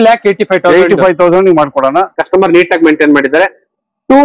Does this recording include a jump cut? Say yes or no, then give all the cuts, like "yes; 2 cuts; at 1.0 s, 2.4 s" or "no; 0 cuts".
yes; 1 cut; at 2.2 s